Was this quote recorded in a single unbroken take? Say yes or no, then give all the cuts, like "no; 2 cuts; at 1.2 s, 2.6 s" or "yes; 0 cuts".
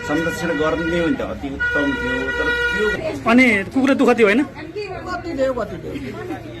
no; 1 cut; at 2.9 s